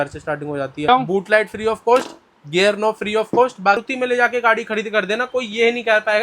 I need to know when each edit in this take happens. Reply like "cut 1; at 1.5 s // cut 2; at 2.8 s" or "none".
cut 1; at 0.9 s // cut 2; at 3.8 s